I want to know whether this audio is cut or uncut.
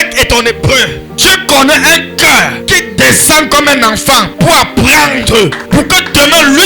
cut